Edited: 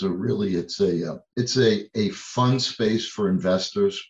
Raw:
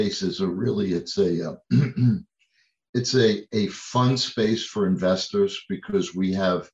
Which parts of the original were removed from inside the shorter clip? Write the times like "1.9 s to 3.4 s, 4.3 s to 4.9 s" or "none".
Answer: 1.6 s to 2.8 s

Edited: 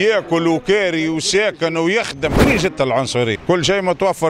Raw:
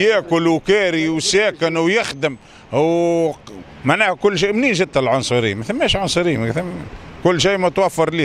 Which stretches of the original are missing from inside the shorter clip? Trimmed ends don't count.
2.4 s to 4.5 s, 5.6 s to 7.2 s

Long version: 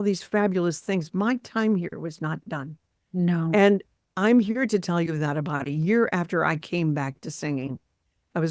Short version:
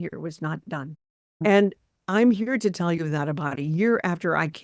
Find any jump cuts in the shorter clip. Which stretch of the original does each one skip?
3.1 s to 3.4 s

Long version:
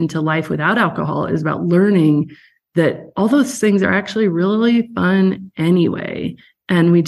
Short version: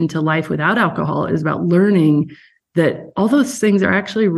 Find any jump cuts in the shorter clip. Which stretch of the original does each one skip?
none

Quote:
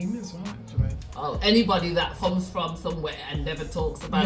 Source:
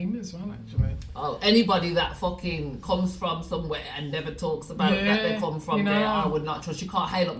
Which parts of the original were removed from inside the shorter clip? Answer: 2.1 s to 2.8 s

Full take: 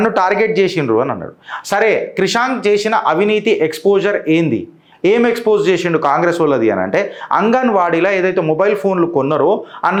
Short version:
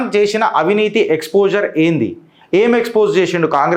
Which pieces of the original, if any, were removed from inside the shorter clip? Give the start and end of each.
none

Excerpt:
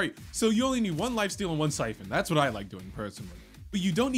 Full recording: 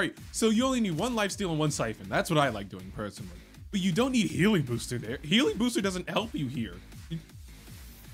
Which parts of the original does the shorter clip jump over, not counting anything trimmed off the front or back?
none

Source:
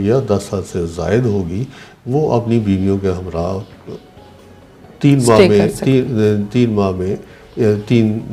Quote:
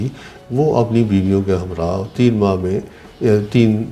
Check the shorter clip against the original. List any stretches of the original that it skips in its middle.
3.7 s to 6.5 s

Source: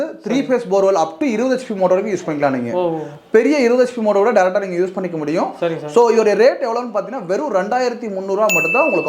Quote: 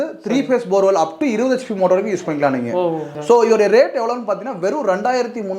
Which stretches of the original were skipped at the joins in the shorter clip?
3.1 s to 5.8 s

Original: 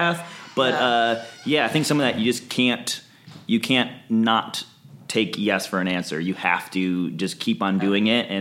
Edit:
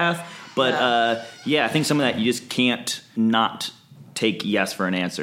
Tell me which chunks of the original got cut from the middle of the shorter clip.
3.0 s to 4.0 s

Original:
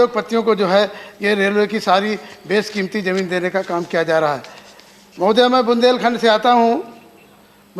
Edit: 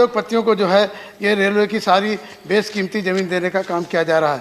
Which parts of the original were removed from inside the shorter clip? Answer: none

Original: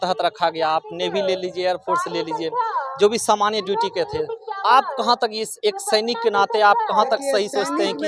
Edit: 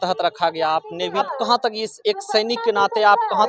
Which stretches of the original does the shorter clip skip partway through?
1.2 s to 4.8 s

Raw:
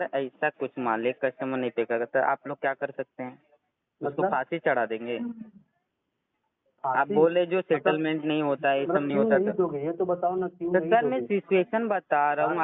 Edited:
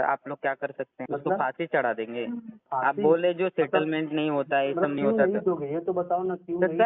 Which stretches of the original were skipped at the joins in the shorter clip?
3.2 s to 3.9 s, 5.5 s to 6.7 s

